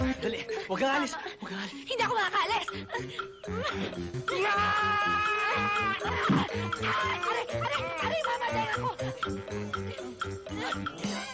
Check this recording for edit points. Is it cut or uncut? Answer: cut